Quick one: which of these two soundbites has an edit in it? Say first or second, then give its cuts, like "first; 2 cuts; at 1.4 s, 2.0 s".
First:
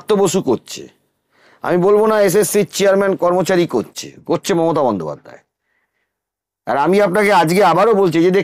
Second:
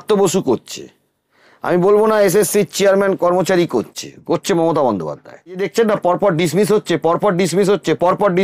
second; 1 cut; at 5.7 s